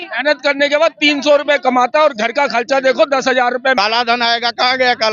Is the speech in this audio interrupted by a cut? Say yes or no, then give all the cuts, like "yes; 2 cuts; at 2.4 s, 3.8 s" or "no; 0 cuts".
yes; 1 cut; at 3.8 s